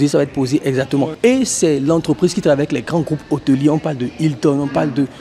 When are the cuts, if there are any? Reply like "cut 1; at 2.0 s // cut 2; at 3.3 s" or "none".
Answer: cut 1; at 1.1 s